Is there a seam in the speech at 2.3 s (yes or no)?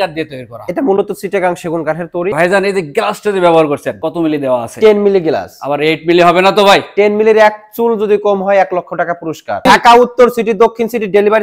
yes